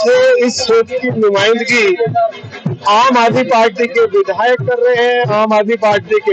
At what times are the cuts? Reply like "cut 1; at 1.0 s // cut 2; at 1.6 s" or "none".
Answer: none